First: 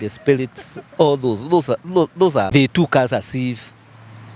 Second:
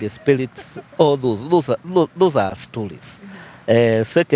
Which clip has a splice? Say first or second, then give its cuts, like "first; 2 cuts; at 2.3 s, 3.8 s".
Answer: first; 1 cut; at 2.5 s